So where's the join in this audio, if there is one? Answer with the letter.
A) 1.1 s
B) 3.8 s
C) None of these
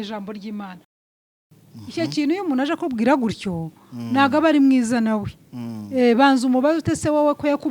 A